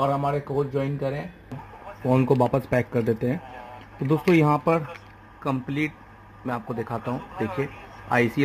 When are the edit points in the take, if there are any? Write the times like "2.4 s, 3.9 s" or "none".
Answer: 1.6 s